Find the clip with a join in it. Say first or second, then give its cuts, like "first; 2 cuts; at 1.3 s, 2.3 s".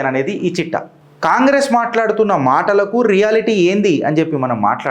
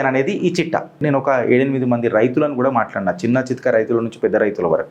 second; 1 cut; at 1.0 s